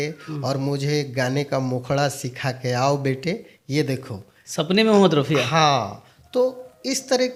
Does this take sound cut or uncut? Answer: uncut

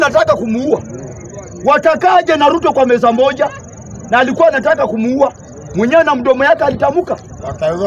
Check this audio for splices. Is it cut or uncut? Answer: uncut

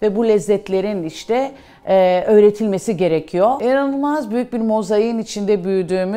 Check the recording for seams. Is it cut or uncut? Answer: cut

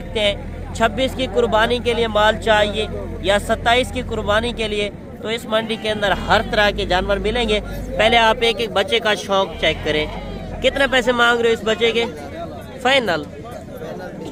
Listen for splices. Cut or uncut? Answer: uncut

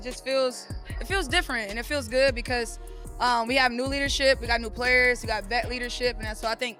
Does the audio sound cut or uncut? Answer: uncut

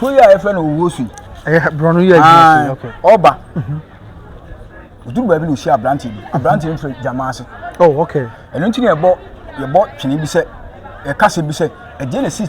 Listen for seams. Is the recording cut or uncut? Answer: uncut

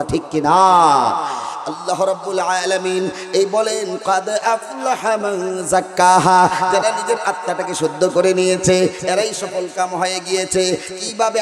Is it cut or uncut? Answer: uncut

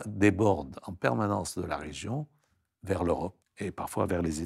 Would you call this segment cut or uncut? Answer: cut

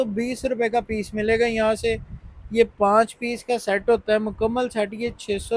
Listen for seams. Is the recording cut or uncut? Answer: uncut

